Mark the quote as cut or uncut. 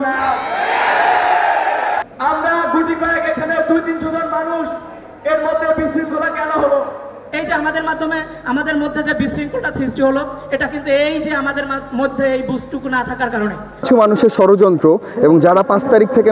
cut